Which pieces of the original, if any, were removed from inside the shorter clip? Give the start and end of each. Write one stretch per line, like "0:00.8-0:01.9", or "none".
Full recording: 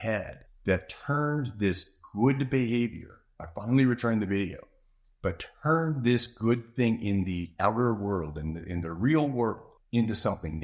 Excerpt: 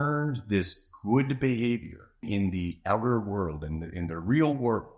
0:03.4-0:07.0